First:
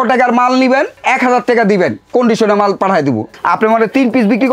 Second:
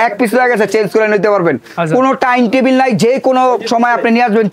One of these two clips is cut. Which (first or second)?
first